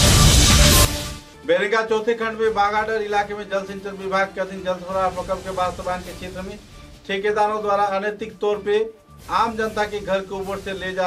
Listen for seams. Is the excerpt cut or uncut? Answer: cut